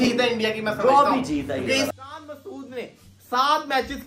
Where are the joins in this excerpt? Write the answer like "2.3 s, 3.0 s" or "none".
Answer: 2.1 s